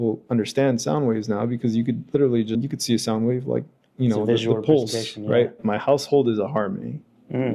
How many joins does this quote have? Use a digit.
2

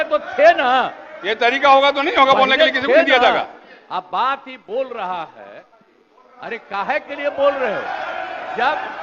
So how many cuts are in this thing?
0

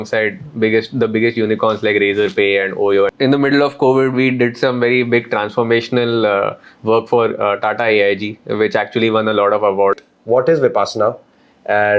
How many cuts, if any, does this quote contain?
2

